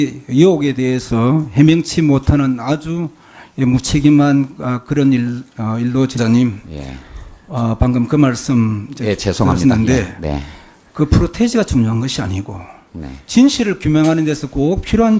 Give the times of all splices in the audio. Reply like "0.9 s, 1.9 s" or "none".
none